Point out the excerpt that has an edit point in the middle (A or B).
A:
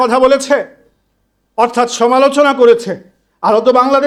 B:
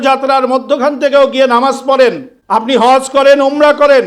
B